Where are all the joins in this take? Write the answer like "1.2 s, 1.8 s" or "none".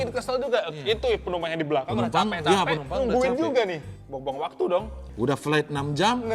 3.9 s, 5.0 s